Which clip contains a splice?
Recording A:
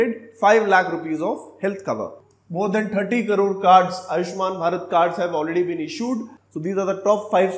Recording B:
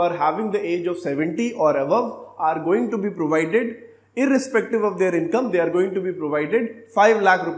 A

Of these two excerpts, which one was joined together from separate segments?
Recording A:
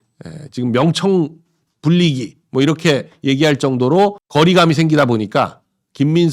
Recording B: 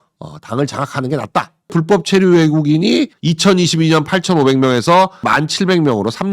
B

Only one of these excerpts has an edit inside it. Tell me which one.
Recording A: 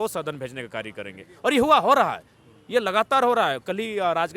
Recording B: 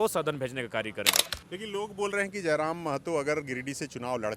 B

